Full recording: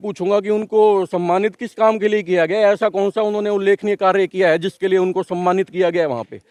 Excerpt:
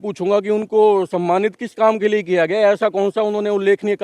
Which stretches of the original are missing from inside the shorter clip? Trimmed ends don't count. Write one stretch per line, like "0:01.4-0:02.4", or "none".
none